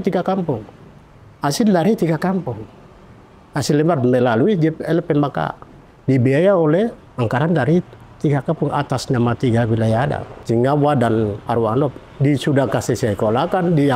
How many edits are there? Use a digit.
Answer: 2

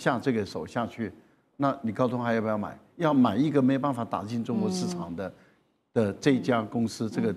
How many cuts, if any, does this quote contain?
0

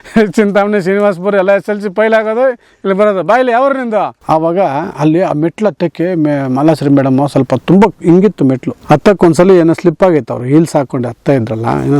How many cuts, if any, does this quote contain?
2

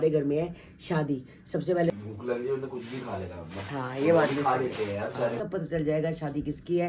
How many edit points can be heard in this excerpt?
2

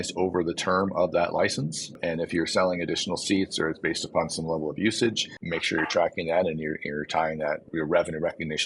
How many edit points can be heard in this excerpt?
3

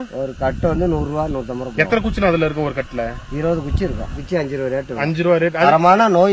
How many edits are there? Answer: 2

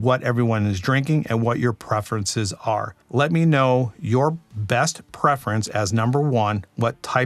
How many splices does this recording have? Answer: 1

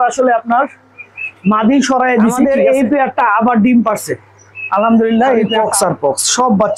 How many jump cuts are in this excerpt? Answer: 2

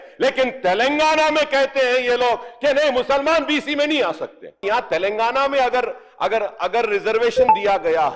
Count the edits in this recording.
1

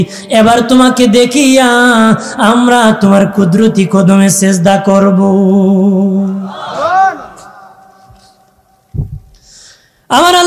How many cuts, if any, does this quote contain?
0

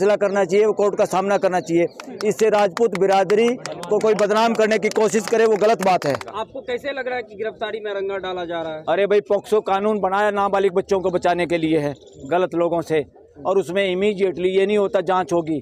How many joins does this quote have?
1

